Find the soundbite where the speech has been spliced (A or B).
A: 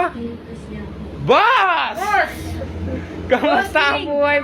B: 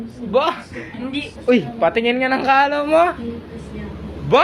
B